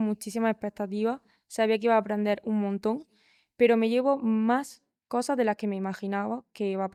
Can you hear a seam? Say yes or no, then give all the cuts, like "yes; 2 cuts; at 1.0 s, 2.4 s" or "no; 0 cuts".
no; 0 cuts